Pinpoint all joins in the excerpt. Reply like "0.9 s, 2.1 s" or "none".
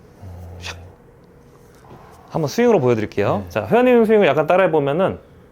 1.8 s